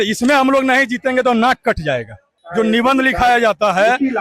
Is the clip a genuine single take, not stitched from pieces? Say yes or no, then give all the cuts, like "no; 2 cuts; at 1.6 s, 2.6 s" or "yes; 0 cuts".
no; 1 cut; at 2.4 s